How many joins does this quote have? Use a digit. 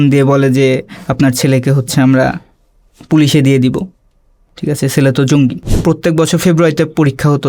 1